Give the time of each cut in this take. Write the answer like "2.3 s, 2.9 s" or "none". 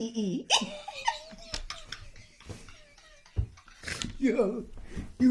3.6 s